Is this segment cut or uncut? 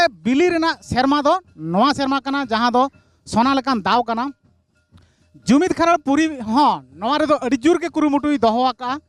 uncut